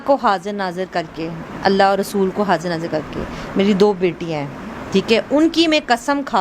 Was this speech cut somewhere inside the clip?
yes; 1 cut; at 1.4 s

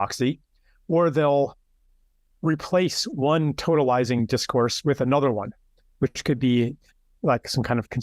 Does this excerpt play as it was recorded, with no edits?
yes; 0 cuts

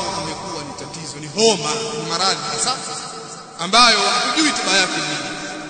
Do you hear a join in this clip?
no; 0 cuts

